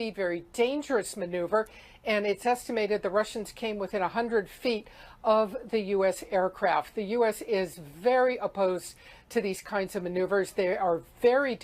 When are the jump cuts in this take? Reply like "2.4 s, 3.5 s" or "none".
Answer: 6.2 s